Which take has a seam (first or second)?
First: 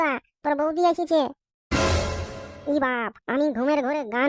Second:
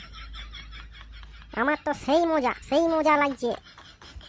second